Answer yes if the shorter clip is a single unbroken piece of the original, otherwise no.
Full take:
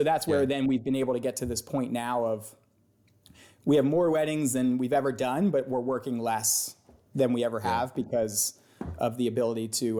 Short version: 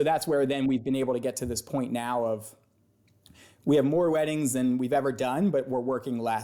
yes